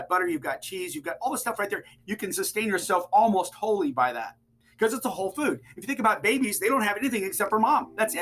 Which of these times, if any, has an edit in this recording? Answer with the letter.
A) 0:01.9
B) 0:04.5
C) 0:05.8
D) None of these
A